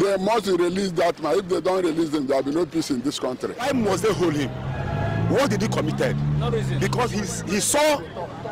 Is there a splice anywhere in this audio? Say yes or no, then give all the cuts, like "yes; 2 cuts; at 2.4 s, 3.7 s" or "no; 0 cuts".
yes; 1 cut; at 3.6 s